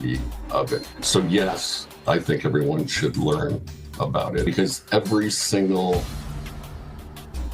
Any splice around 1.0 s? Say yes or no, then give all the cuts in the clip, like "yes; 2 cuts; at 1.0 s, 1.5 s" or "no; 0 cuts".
yes; 2 cuts; at 1.0 s, 4.5 s